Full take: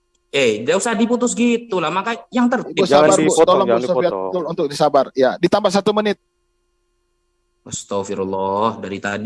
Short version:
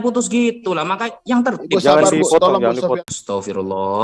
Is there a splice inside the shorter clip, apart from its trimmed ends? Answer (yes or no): yes